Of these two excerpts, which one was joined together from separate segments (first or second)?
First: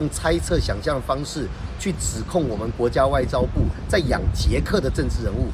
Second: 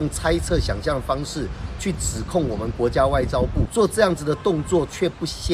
second